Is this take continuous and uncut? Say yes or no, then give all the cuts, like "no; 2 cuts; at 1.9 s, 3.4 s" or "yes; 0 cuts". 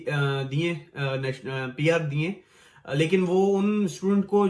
yes; 0 cuts